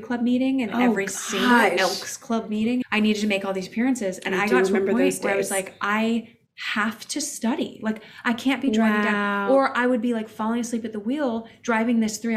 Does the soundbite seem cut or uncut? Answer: cut